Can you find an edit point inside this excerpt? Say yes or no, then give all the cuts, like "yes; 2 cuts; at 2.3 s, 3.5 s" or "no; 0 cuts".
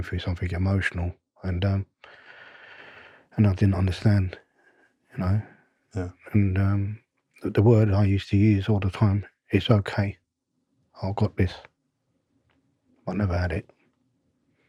no; 0 cuts